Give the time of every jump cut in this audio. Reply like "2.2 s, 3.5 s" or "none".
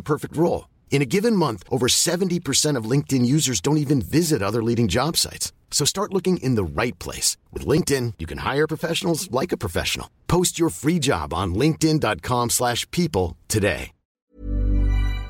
14.2 s